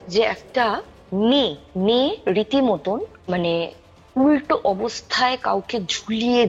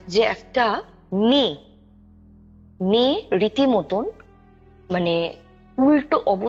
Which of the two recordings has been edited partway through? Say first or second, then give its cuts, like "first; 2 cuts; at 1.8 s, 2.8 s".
first; 2 cuts; at 1.6 s, 3.1 s